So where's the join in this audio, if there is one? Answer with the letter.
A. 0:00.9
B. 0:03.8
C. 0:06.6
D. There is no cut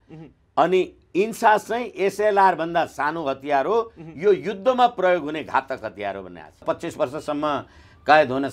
C